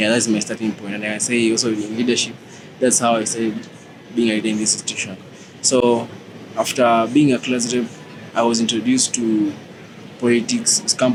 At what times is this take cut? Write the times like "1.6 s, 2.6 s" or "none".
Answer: none